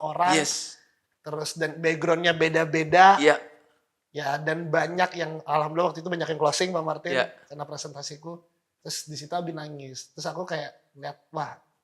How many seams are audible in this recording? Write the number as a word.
zero